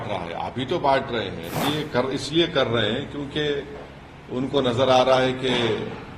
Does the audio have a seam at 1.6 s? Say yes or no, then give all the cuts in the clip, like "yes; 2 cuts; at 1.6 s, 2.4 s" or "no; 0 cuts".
yes; 1 cut; at 1.6 s